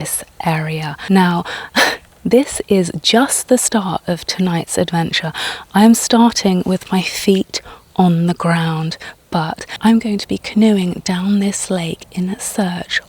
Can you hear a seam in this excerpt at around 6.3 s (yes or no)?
no